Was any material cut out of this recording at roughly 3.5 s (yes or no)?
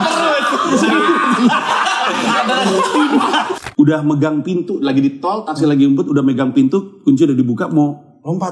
yes